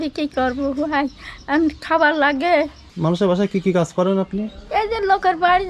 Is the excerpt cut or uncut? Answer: cut